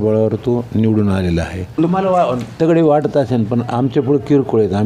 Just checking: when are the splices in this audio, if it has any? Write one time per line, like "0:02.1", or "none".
0:01.8

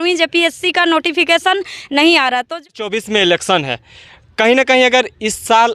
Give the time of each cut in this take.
0:02.8

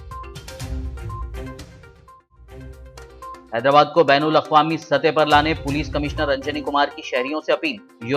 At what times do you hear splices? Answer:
0:03.1

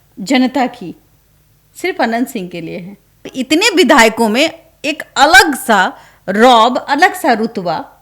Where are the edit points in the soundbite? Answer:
0:03.3

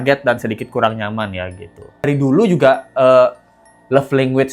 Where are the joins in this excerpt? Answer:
0:02.0

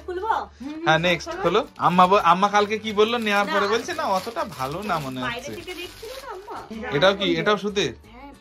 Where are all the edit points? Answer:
0:01.7
0:06.7

